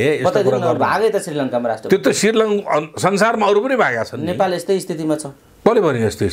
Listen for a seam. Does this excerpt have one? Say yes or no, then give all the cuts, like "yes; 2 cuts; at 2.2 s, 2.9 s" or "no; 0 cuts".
no; 0 cuts